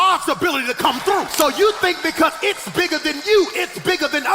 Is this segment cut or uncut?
cut